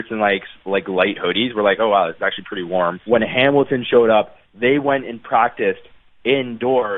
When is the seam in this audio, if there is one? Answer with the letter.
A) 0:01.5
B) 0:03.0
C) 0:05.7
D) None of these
B